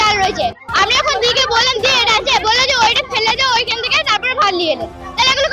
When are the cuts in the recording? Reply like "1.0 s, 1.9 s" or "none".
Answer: none